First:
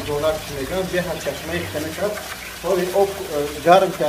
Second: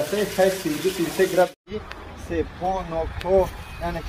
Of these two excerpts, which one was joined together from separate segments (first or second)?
second